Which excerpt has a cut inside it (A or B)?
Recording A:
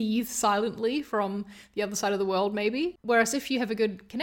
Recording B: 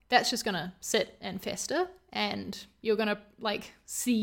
A